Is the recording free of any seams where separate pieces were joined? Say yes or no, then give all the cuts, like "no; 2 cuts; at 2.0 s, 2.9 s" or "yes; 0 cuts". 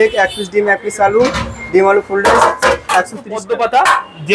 no; 1 cut; at 3.4 s